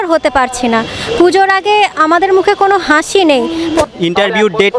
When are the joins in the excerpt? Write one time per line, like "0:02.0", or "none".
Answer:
0:03.8